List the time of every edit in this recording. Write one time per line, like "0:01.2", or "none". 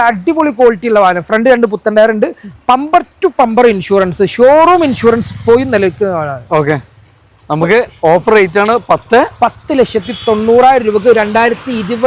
none